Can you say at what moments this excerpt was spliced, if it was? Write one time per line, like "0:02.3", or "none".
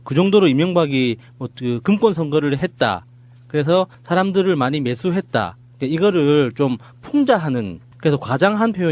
0:06.5